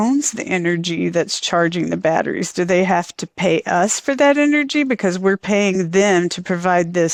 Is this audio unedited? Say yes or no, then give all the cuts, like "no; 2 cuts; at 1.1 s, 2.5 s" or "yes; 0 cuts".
yes; 0 cuts